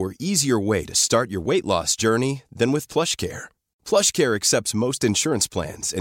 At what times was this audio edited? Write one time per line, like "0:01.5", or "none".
none